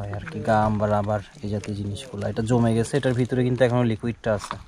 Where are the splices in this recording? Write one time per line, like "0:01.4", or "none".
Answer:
none